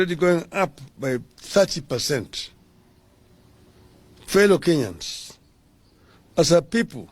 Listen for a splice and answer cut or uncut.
cut